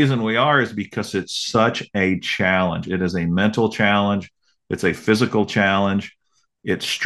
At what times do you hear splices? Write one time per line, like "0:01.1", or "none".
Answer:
none